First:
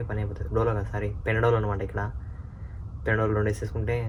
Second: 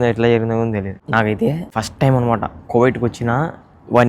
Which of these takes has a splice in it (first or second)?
second